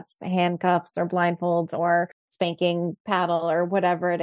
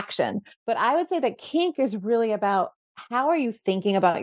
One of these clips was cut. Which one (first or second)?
first